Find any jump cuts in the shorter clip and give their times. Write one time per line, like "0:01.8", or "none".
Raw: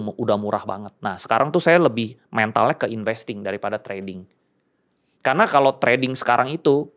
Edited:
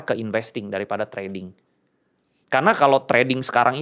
none